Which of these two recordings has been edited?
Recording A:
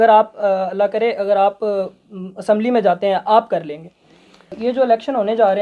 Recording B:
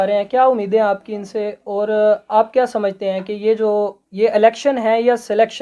A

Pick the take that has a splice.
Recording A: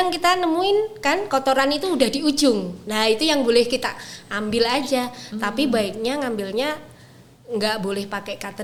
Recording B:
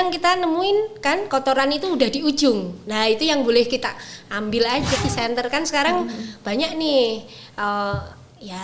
B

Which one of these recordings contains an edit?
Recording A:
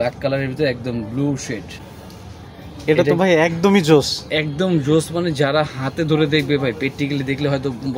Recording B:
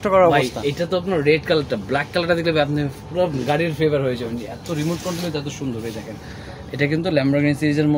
A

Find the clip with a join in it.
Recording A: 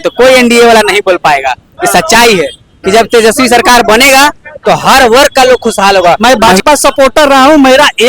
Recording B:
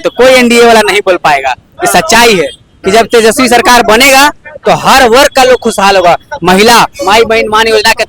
A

